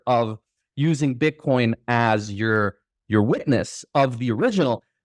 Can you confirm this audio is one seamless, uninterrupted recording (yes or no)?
yes